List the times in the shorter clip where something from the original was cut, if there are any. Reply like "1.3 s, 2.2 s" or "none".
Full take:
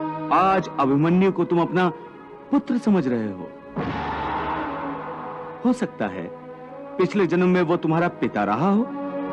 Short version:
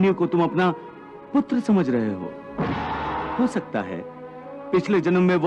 3.3 s